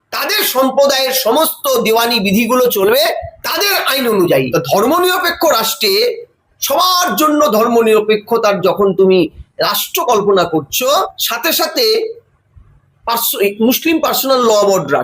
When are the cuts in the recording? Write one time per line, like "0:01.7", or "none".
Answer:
0:04.5
0:10.9